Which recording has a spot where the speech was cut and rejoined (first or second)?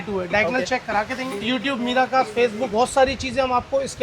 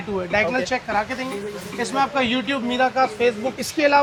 first